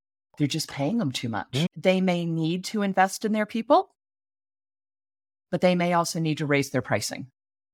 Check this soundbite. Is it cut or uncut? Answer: cut